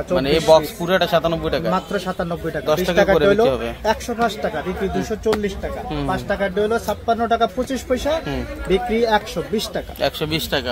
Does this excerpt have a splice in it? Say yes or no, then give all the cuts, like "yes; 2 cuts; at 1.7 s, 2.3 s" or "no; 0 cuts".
no; 0 cuts